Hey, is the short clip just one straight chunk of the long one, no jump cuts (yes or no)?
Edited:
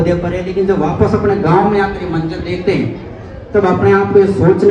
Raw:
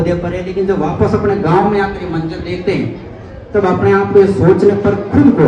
yes